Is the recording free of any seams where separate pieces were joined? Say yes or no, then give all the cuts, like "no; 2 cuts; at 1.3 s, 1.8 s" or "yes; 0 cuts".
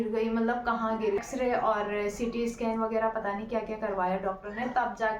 no; 1 cut; at 1.2 s